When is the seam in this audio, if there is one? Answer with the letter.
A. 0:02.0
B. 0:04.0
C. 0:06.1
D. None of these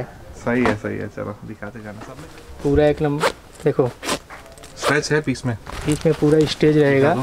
A